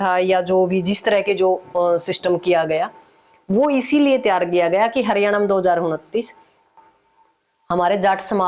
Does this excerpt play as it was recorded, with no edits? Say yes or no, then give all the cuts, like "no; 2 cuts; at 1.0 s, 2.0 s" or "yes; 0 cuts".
no; 1 cut; at 6.7 s